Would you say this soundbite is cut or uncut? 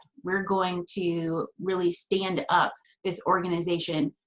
cut